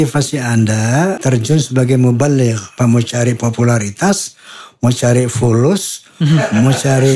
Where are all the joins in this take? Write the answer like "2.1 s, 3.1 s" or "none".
1.2 s, 2.7 s